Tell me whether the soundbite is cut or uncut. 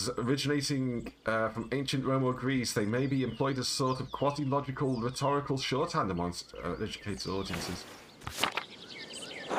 uncut